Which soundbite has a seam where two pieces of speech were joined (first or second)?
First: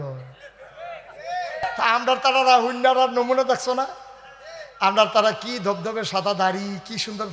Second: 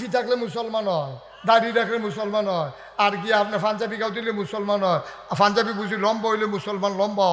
first